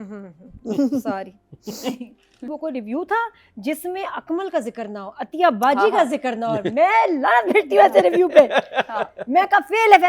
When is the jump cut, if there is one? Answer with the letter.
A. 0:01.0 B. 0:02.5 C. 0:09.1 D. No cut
B